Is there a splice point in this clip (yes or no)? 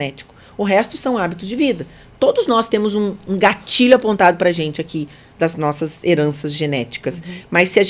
no